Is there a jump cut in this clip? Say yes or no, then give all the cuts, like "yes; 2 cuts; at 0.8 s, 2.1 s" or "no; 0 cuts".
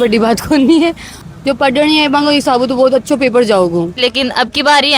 yes; 2 cuts; at 1.3 s, 4.0 s